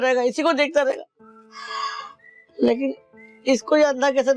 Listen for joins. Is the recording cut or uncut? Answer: uncut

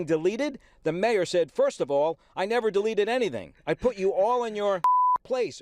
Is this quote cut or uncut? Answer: cut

